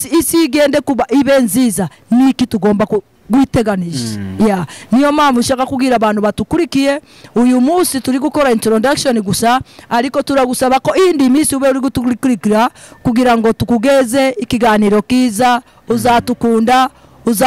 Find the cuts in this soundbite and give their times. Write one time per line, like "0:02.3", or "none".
none